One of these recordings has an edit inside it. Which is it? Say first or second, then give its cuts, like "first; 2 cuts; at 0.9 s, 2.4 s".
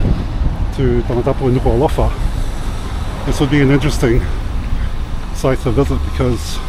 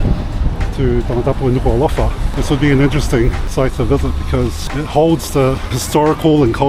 second; 4 cuts; at 2.2 s, 3.4 s, 4.6 s, 5.8 s